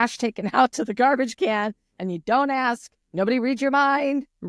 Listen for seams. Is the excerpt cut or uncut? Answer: uncut